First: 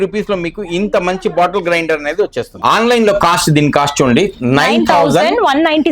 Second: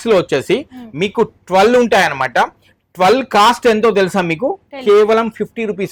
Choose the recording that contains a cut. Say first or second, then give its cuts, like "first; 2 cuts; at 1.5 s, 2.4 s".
first; 1 cut; at 2.5 s